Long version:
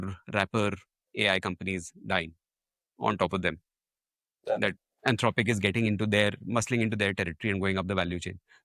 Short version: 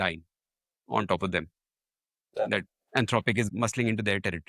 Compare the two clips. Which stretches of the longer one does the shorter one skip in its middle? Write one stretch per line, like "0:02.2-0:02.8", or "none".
0:05.6-0:06.4